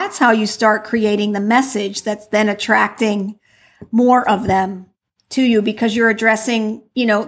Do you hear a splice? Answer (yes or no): no